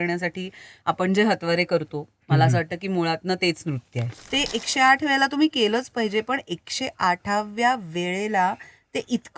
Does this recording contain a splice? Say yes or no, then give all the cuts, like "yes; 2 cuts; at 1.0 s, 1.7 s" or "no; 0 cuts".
yes; 1 cut; at 4.2 s